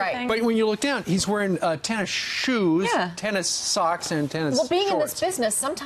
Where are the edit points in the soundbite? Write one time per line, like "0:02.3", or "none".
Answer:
0:02.0